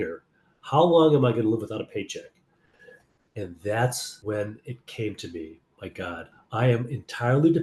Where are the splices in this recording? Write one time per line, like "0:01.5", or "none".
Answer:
0:04.1
0:06.3